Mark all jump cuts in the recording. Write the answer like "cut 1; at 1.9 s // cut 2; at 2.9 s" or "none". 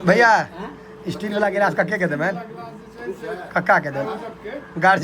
none